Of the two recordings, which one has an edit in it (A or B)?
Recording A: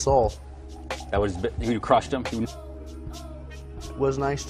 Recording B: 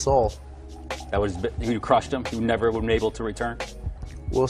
B